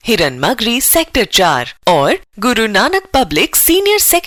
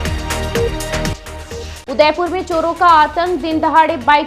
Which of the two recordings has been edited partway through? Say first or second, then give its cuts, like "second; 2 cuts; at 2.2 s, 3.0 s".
second; 1 cut; at 1.1 s